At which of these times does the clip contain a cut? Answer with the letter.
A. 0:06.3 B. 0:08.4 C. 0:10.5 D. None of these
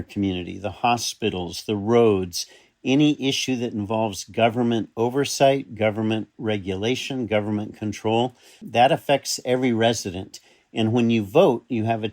A